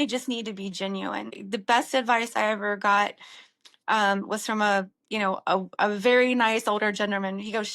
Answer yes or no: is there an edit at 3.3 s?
no